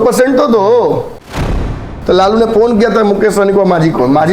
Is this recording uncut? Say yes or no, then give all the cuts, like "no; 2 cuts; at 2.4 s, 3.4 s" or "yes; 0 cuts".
no; 1 cut; at 1.6 s